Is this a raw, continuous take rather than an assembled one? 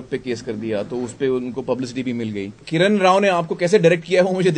no; 1 cut; at 2.6 s

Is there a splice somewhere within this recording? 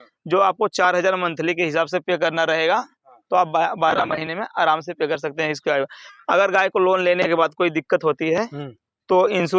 no; 0 cuts

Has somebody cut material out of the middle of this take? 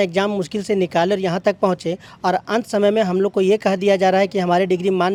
no; 0 cuts

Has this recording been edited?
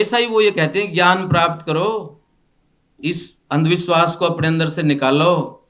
no; 0 cuts

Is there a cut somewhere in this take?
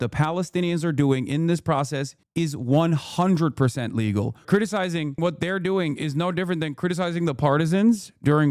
yes; 1 cut; at 4.4 s

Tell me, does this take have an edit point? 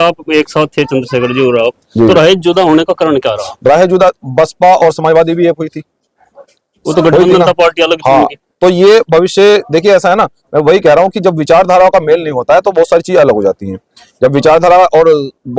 no; 0 cuts

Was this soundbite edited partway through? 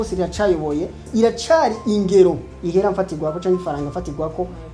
yes; 1 cut; at 1.0 s

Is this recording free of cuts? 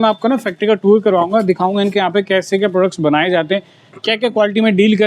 yes; 0 cuts

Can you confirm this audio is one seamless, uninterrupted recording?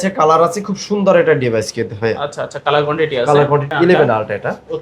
no; 1 cut; at 3.7 s

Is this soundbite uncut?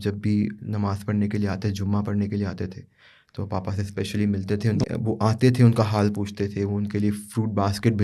no; 1 cut; at 4.8 s

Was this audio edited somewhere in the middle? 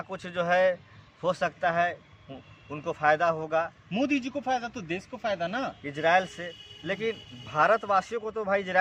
no; 0 cuts

